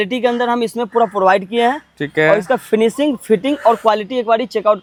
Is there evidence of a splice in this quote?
no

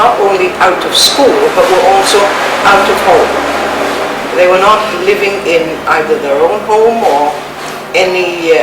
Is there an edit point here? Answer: no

